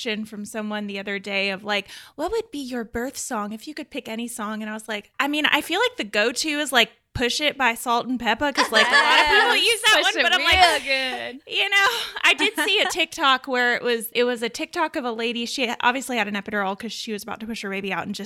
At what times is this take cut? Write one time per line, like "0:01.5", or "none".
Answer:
0:02.0
0:05.1